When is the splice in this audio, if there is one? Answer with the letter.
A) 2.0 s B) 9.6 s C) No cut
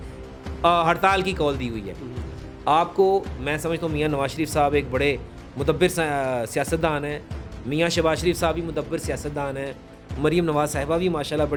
C